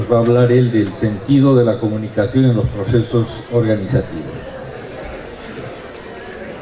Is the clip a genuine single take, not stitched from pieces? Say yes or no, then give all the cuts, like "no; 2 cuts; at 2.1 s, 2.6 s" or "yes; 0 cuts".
no; 1 cut; at 2.5 s